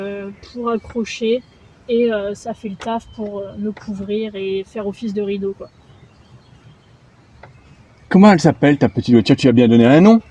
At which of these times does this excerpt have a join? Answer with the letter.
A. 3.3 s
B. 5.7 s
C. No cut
C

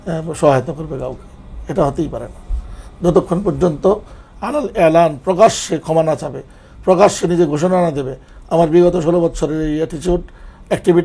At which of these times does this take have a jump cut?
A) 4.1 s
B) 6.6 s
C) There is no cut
C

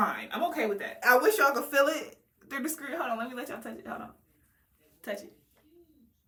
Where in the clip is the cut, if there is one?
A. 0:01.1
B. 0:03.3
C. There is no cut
C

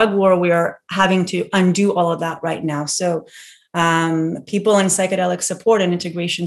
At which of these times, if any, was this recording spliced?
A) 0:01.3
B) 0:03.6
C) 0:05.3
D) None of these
D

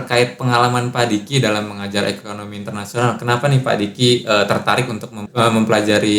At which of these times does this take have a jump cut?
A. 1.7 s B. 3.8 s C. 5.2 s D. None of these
C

